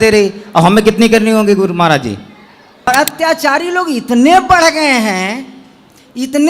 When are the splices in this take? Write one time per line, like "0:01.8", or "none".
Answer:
0:02.9